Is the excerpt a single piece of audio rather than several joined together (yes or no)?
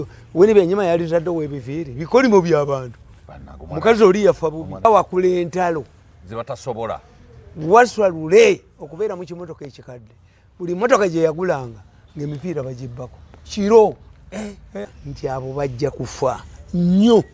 no